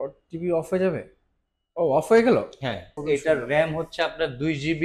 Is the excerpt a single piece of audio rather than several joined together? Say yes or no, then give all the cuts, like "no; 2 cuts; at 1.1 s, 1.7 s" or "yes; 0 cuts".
no; 1 cut; at 2.9 s